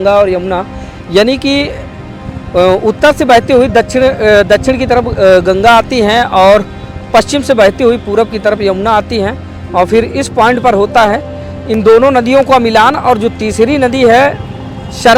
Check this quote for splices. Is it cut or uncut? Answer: uncut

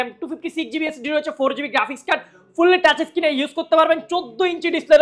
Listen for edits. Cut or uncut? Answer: uncut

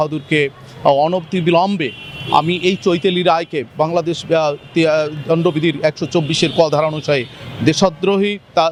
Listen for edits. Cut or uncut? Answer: uncut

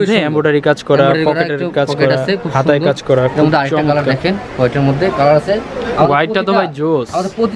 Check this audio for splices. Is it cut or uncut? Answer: uncut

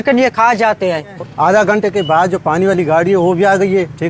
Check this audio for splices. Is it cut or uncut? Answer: cut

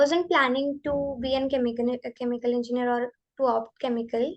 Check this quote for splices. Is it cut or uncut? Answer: uncut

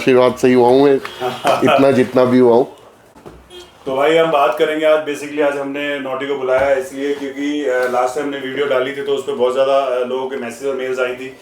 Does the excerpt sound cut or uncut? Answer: uncut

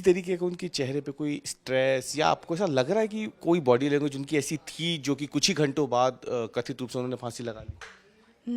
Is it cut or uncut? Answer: uncut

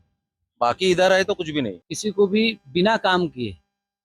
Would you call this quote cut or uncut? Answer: cut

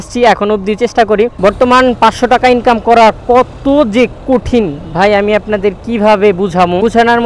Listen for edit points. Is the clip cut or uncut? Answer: cut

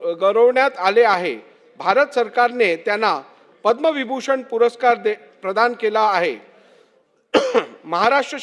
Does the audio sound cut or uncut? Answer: uncut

